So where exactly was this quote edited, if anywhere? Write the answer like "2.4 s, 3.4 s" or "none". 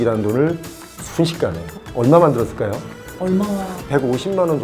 1.8 s

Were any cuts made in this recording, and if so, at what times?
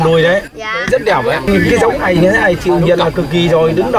1.5 s

